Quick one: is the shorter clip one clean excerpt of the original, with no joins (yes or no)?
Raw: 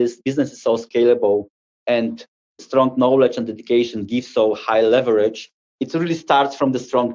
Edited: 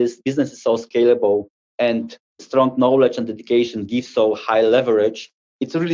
no